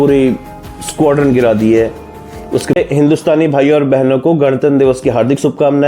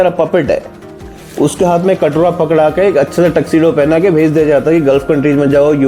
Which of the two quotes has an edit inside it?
first; 1 cut; at 2.8 s

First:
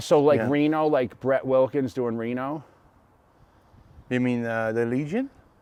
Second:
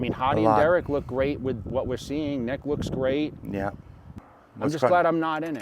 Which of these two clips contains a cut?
second; 1 cut; at 4.2 s

